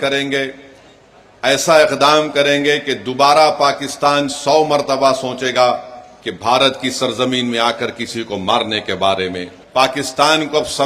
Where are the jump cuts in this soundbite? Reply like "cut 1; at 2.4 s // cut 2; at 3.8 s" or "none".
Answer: cut 1; at 9.5 s

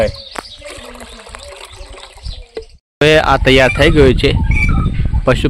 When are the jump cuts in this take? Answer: cut 1; at 2.8 s

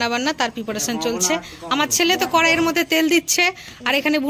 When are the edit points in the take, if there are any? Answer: none

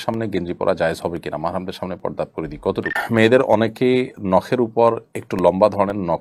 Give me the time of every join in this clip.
cut 1; at 3.0 s

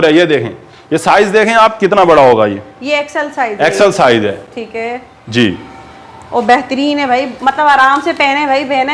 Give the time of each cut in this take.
none

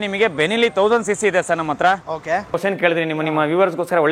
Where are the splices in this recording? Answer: cut 1; at 2.5 s

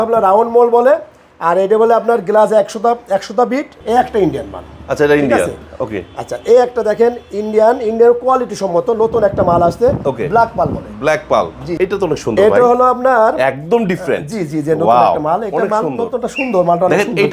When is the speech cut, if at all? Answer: cut 1; at 3.7 s // cut 2; at 11.6 s

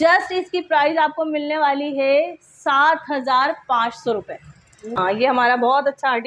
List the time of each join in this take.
cut 1; at 5.0 s

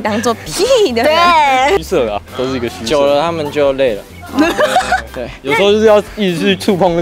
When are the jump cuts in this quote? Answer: cut 1; at 1.8 s

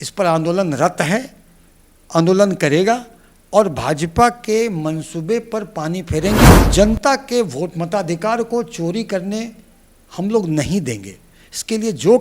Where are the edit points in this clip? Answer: cut 1; at 6.6 s

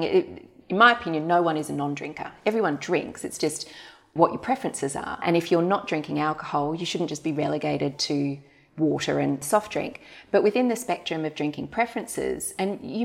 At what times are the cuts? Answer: cut 1; at 4.1 s // cut 2; at 5.2 s // cut 3; at 9.4 s

